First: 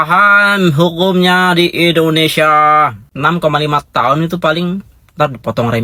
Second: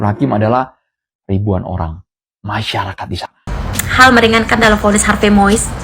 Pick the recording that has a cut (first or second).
second